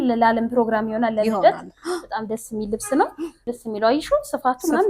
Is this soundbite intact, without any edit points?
no; 1 cut; at 3.5 s

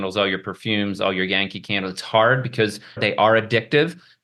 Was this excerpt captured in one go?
no; 1 cut; at 3.0 s

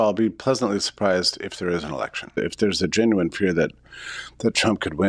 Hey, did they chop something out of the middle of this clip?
yes; 1 cut; at 2.3 s

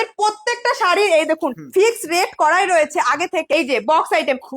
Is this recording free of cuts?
no; 1 cut; at 3.5 s

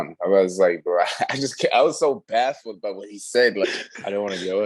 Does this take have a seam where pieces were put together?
yes; 1 cut; at 3.6 s

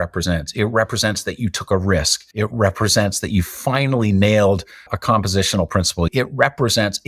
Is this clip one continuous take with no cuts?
no; 2 cuts; at 2.2 s, 6.1 s

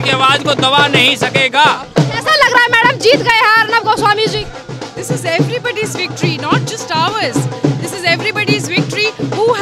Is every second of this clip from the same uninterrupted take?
yes; 0 cuts

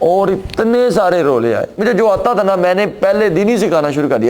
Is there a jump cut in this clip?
yes; 1 cut; at 1.7 s

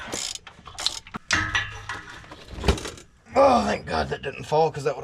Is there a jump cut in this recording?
yes; 1 cut; at 1.2 s

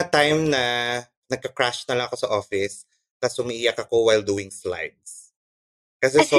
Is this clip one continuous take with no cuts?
no; 1 cut; at 1.2 s

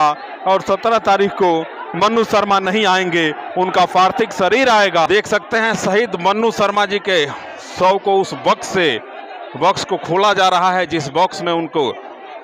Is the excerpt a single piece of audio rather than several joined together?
no; 1 cut; at 5.1 s

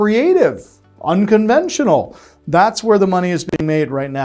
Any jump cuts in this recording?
no; 0 cuts

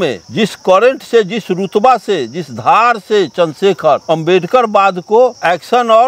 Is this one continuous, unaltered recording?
yes; 0 cuts

